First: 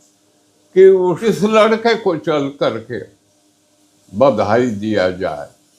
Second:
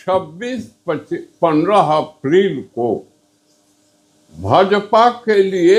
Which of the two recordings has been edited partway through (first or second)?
first